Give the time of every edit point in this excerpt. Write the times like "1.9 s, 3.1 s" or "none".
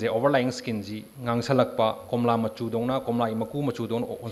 none

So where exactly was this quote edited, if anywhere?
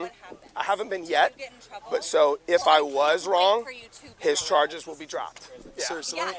none

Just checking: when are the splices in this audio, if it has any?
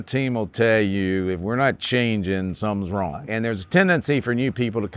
3.3 s

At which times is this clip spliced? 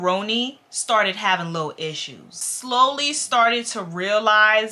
2.4 s

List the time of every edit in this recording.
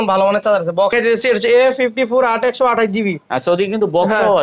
0.9 s

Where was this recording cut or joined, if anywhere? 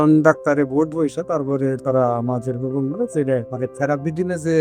3.5 s

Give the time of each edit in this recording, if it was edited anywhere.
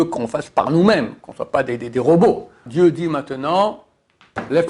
2.6 s

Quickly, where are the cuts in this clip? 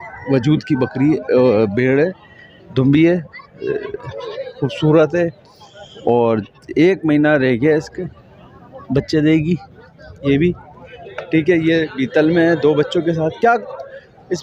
none

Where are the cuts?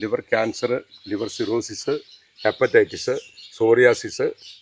none

